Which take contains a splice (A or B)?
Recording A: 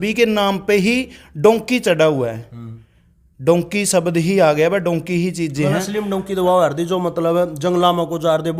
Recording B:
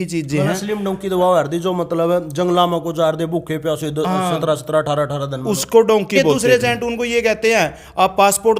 B